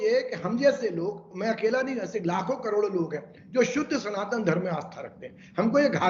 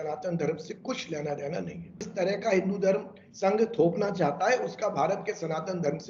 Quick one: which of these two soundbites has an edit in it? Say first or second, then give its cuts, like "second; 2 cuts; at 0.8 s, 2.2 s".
second; 1 cut; at 2.1 s